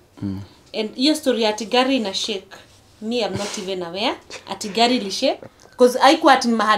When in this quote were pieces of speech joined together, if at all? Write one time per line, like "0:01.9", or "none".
0:05.4